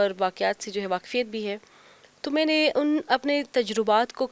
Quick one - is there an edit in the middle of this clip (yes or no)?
no